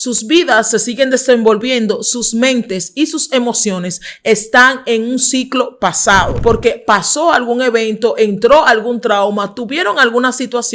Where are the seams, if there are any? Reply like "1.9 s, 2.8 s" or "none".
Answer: 6.3 s